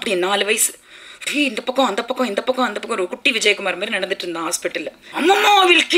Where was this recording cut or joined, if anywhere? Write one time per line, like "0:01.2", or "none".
0:05.0